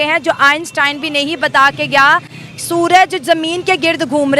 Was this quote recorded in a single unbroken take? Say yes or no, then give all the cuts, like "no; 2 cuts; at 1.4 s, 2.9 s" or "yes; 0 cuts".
yes; 0 cuts